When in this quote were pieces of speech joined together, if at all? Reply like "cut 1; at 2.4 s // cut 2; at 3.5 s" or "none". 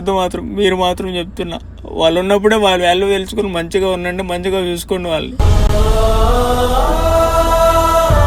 none